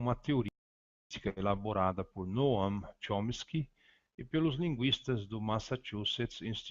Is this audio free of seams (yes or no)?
no